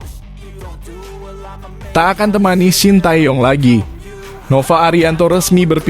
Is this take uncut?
no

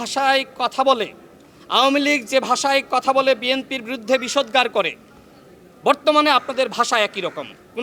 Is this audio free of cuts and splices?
yes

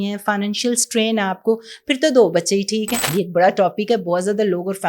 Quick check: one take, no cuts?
no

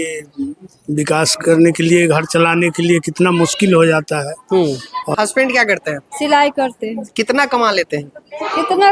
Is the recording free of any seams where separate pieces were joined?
no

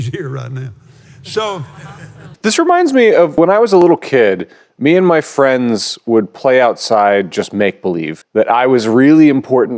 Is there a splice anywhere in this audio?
yes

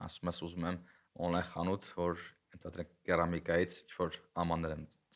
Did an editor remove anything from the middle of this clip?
no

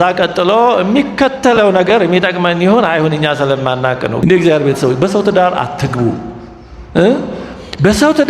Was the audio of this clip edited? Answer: yes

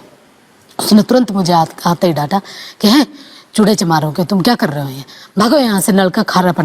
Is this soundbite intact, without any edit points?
yes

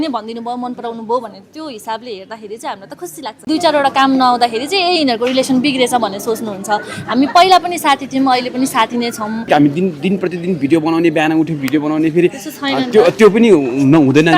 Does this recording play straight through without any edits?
no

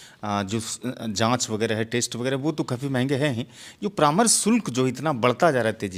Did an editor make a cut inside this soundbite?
no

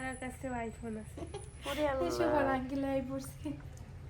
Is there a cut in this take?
no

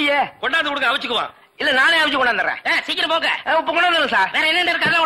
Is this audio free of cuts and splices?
yes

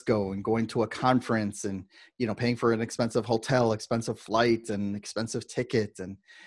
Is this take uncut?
yes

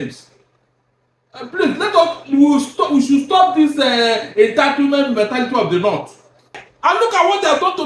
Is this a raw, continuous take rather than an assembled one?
no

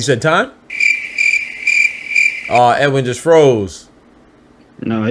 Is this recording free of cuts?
yes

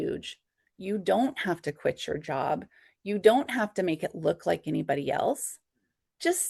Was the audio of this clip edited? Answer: no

